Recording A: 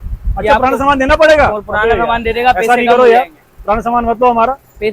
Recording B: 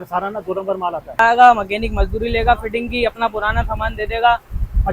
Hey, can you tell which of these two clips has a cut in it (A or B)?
B